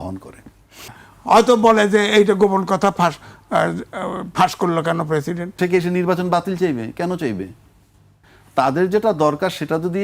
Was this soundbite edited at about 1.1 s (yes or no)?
yes